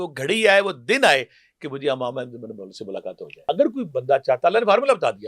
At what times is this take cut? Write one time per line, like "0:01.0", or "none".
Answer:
0:03.5